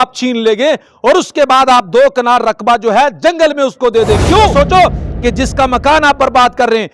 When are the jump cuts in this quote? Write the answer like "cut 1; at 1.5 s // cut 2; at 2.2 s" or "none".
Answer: cut 1; at 4.5 s